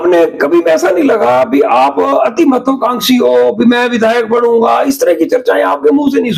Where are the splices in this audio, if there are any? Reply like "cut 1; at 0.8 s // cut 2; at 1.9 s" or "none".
none